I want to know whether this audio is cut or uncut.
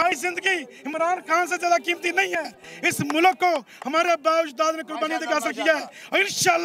uncut